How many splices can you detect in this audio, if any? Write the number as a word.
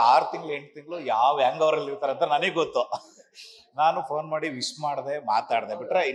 zero